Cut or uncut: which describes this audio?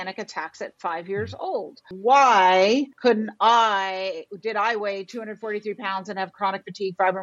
cut